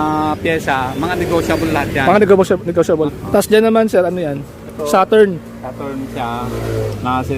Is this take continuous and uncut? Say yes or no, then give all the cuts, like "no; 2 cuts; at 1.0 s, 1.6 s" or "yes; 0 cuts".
no; 1 cut; at 3.1 s